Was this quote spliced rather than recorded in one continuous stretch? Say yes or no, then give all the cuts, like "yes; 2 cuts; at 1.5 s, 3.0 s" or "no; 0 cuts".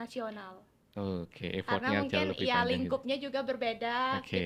no; 0 cuts